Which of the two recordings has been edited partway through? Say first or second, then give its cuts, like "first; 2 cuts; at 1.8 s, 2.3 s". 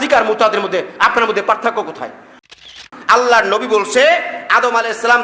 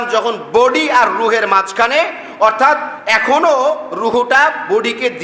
first; 1 cut; at 2.5 s